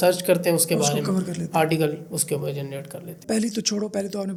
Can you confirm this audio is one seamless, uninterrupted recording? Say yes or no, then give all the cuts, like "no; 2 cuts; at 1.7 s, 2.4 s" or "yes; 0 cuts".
yes; 0 cuts